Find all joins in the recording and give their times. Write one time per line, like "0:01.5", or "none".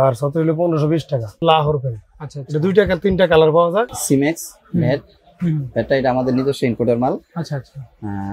0:01.4
0:04.0